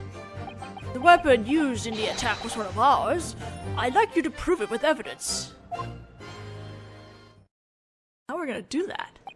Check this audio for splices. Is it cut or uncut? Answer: cut